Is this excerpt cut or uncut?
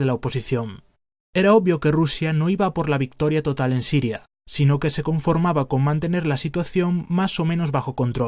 uncut